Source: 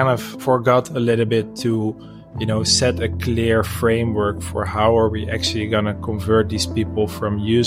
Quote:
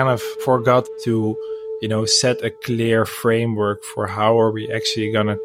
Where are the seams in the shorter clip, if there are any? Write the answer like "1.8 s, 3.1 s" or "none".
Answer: 0.9 s